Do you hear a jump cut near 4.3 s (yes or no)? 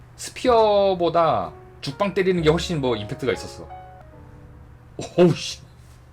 yes